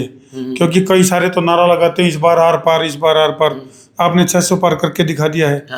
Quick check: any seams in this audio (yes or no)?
no